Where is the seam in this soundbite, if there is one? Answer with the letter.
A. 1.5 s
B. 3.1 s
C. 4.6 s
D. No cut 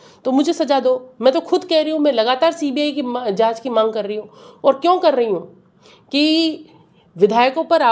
D